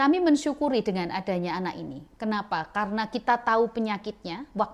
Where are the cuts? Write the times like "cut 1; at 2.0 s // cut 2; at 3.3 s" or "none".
none